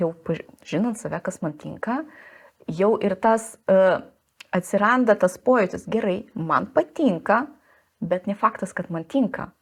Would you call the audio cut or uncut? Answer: uncut